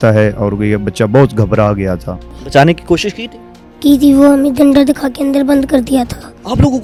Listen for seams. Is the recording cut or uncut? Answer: uncut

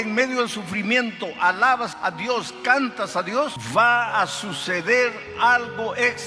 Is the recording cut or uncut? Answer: cut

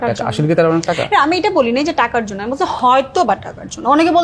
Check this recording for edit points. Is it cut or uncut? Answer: uncut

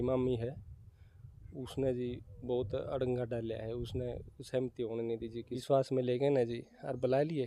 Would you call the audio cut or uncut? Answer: cut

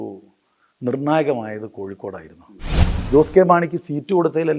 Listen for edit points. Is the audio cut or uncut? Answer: cut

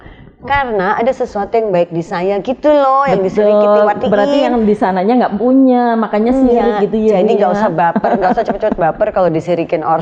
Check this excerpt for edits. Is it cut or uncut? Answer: uncut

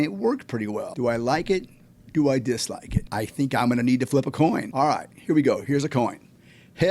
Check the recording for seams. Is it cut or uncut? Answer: cut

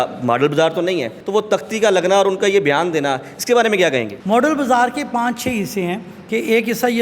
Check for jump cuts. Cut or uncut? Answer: cut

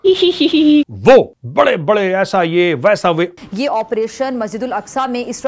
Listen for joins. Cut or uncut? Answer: cut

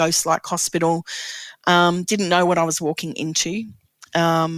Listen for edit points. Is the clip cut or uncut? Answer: uncut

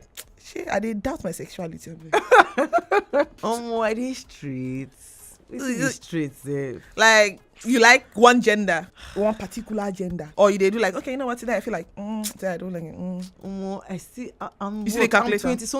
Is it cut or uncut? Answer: cut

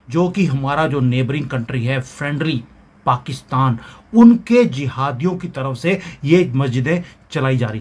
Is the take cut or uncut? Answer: uncut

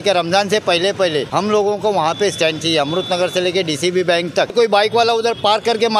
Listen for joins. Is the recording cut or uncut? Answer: cut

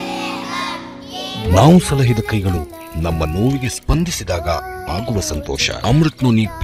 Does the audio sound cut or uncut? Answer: uncut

